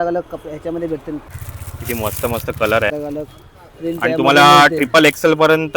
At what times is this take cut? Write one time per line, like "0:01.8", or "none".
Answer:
0:01.3
0:02.9

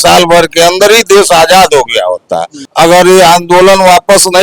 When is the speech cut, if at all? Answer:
0:02.6

